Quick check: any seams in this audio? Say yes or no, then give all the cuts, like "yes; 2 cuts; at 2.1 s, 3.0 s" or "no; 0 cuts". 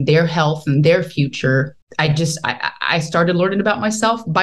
yes; 1 cut; at 1.8 s